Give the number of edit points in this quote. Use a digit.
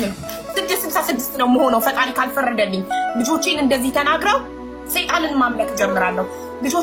0